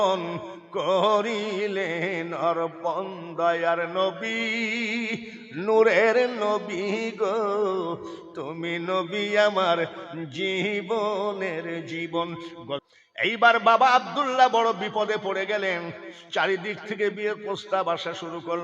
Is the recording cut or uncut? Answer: cut